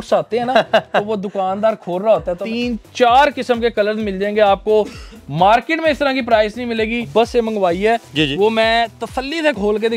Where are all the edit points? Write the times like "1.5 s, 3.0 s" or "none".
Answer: 2.4 s, 7.0 s